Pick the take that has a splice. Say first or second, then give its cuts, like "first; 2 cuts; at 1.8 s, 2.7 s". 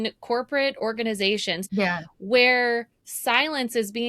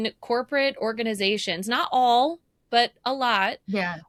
first; 1 cut; at 1.6 s